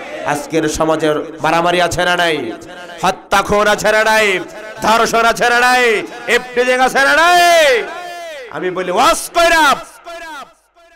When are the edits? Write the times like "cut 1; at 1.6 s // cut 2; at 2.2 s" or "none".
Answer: none